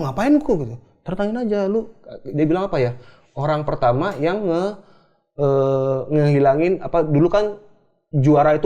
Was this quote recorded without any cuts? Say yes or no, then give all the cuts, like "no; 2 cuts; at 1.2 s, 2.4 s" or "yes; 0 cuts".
yes; 0 cuts